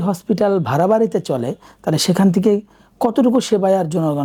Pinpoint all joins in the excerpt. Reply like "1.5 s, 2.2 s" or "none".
none

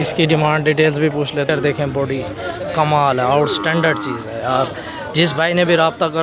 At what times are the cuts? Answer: 1.5 s

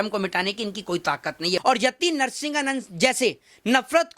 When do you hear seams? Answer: 1.6 s

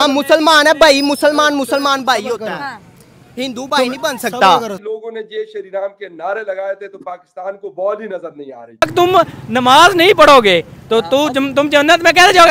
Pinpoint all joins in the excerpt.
4.8 s, 8.8 s

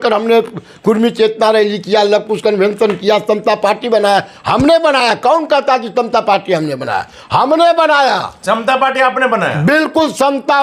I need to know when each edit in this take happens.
none

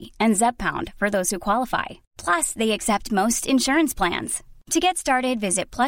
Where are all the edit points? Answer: none

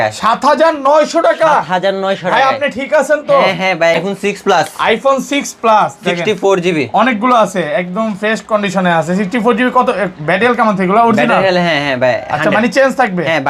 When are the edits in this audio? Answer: 4.0 s

